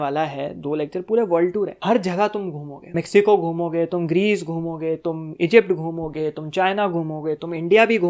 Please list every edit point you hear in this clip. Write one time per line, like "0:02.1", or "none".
0:01.8
0:02.8